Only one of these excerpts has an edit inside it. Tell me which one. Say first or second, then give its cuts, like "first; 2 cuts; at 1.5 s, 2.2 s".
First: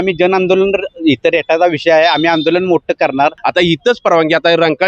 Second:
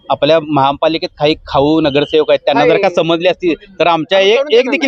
first; 1 cut; at 3.4 s